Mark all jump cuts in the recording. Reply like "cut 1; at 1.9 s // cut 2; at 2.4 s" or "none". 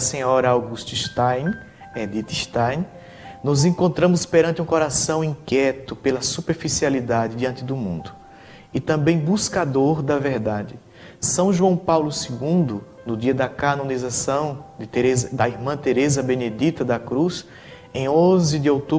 cut 1; at 3.0 s